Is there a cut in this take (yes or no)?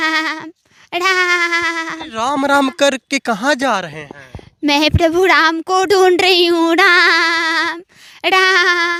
no